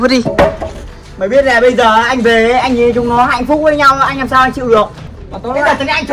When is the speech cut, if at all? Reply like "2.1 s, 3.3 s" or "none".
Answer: 5.0 s